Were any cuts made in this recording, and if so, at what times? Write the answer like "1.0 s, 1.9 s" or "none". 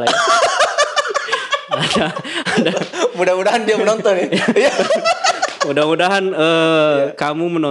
none